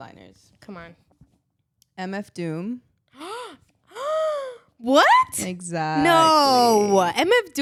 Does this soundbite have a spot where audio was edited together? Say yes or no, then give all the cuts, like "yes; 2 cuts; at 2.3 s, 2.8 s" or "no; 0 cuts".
no; 0 cuts